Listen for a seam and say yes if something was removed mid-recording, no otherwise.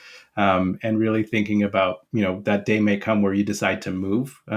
yes